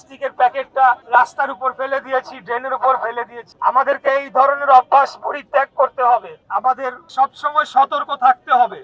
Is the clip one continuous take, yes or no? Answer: no